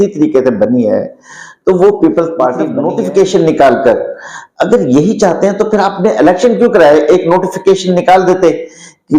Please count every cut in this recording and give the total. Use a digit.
1